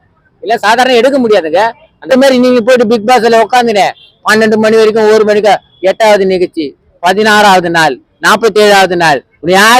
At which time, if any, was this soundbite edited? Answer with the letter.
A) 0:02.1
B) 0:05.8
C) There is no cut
A